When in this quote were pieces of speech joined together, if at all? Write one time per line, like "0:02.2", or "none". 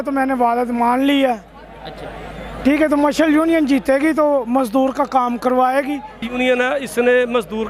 0:06.3